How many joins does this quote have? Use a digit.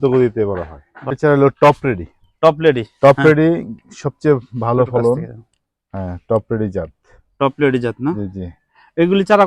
1